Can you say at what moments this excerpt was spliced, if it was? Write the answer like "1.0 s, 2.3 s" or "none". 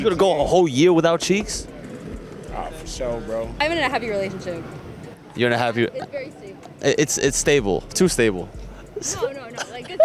3.6 s